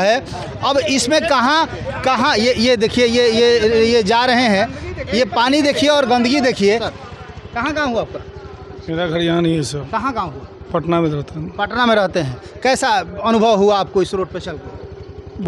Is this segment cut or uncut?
cut